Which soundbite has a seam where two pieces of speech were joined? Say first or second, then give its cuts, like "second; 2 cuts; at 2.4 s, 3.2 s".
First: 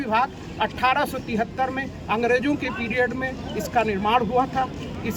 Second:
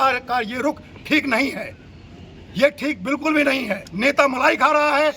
second; 1 cut; at 3.8 s